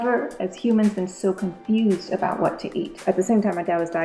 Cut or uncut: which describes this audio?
cut